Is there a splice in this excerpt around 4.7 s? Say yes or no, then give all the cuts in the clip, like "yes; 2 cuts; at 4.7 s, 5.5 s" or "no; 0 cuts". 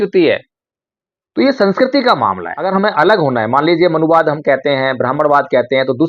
no; 1 cut; at 2.6 s